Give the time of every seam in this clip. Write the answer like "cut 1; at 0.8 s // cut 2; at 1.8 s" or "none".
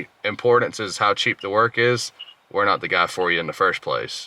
none